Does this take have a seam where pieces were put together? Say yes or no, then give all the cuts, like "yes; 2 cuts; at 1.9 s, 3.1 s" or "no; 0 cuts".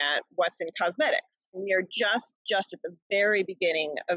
yes; 1 cut; at 1.6 s